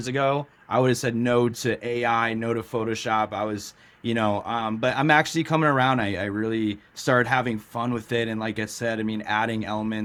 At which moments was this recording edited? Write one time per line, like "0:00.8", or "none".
none